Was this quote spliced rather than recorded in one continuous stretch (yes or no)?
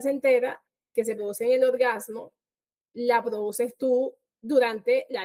no